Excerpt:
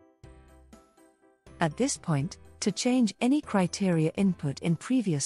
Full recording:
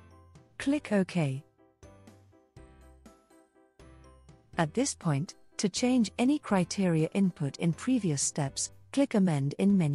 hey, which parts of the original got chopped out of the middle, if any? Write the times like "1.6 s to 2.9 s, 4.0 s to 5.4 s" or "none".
3.9 s to 4.6 s